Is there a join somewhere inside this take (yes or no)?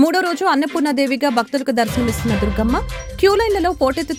no